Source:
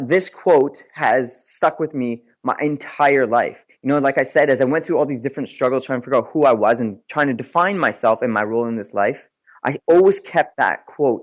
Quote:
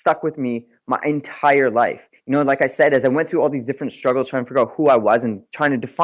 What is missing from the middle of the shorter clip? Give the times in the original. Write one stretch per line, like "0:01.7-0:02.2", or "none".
none